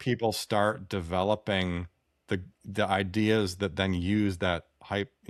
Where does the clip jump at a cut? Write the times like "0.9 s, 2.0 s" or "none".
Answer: none